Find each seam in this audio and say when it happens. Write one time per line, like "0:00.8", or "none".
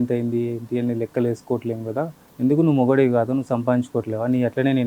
0:02.2